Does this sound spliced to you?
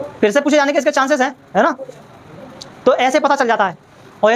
no; 0 cuts

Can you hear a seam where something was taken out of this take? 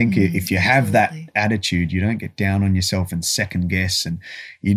no; 0 cuts

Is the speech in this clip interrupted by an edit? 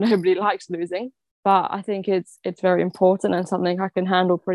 no; 0 cuts

